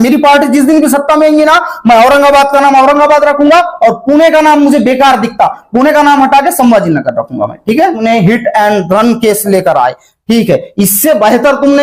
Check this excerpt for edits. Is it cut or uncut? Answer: cut